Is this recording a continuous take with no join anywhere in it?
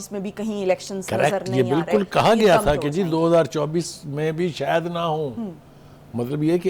yes; 0 cuts

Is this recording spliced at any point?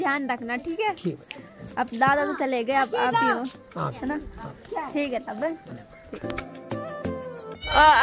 no; 0 cuts

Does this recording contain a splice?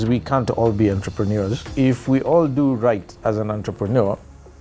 yes; 1 cut; at 1.7 s

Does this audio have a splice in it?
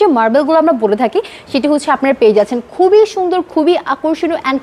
no; 0 cuts

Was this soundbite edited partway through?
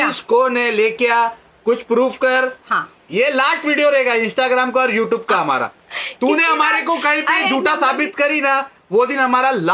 no; 0 cuts

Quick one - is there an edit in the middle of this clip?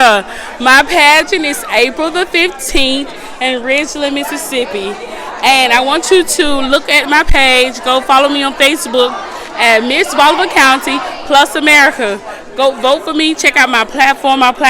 no; 0 cuts

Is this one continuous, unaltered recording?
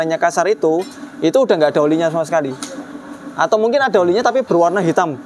yes; 0 cuts

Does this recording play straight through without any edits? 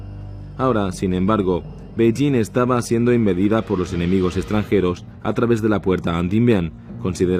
no; 1 cut; at 3.2 s

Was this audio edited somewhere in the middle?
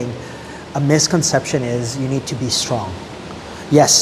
no; 0 cuts

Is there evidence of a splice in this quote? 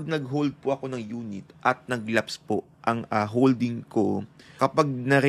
no; 0 cuts

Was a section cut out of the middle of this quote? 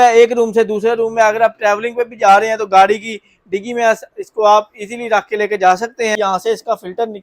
yes; 1 cut; at 6.1 s

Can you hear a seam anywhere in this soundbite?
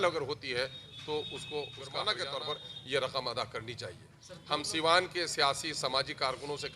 yes; 1 cut; at 2.0 s

